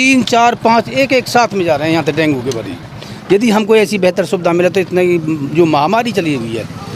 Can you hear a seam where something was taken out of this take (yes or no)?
no